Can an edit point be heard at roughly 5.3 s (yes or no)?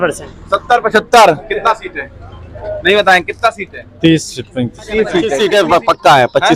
yes